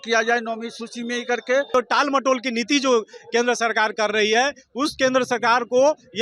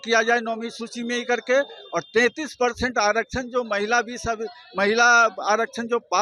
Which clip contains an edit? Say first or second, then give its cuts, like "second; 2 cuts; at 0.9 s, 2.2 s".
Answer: first; 1 cut; at 1.7 s